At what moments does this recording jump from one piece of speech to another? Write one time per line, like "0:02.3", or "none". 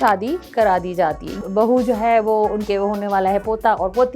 0:01.4